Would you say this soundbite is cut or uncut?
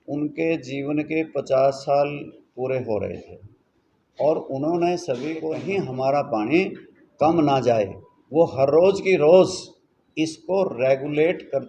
cut